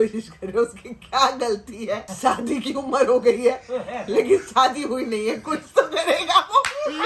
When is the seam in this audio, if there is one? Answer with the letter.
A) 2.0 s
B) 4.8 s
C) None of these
A